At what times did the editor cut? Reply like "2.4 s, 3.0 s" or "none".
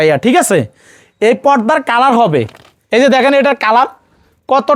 2.7 s